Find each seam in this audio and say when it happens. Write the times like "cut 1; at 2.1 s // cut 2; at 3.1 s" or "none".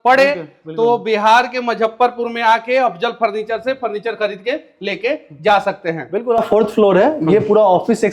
cut 1; at 6.4 s